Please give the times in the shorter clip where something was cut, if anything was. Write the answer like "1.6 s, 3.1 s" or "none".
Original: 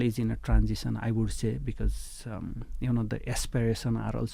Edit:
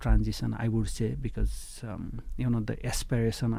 none